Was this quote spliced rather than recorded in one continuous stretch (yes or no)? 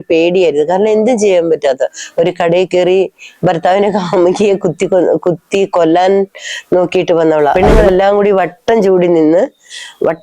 yes